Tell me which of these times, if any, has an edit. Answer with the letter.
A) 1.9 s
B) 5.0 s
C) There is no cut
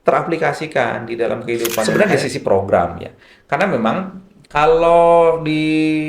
A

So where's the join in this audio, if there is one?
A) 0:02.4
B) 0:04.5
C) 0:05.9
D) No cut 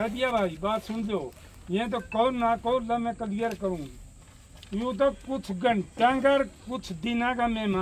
D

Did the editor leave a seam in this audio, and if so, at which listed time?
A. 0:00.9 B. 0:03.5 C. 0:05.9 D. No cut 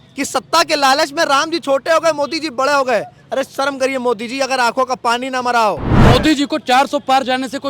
C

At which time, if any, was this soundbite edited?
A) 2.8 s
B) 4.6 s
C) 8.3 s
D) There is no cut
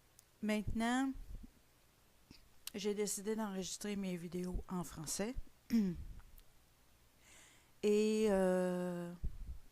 B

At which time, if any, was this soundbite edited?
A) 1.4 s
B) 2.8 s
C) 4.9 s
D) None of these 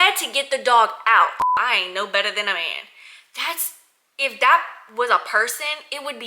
A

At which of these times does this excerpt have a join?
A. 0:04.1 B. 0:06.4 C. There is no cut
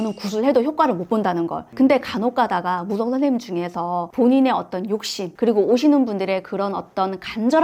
C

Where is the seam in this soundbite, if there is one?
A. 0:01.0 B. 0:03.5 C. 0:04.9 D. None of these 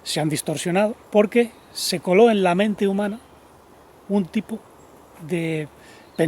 A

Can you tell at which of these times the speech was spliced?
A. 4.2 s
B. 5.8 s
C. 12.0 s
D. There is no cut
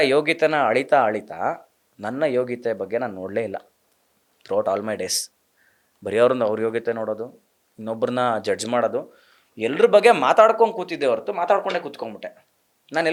D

